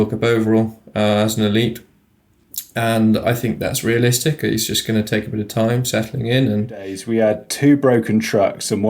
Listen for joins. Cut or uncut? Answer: cut